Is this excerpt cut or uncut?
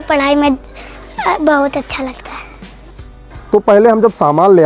uncut